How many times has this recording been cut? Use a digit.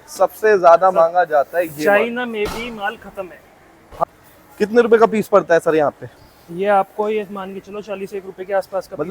1